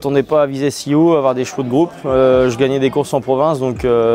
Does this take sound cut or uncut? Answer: uncut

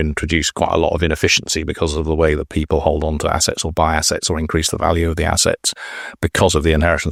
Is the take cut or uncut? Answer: uncut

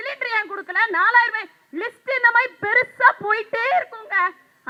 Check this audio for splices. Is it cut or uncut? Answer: uncut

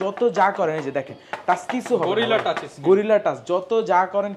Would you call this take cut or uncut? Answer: uncut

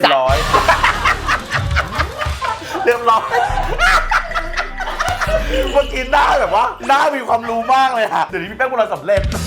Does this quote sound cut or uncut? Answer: uncut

